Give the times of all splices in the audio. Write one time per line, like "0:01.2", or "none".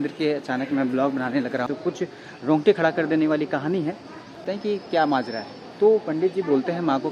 0:01.7
0:04.4